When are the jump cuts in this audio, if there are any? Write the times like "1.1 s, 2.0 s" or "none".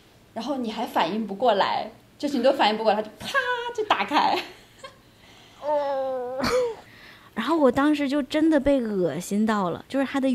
6.9 s